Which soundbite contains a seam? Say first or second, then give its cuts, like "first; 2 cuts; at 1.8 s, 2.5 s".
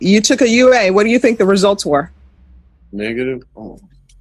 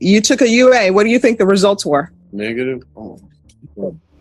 second; 1 cut; at 2.2 s